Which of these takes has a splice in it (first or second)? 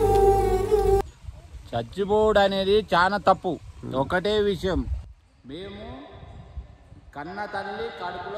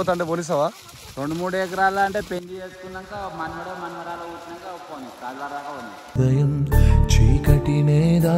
first